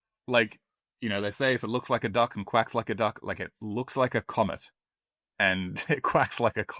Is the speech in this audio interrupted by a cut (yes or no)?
no